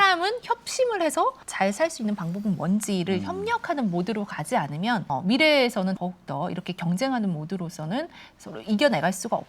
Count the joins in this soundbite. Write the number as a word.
three